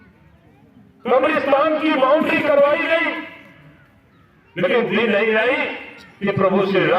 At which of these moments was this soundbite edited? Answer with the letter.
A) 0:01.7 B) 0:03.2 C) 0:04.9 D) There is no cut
C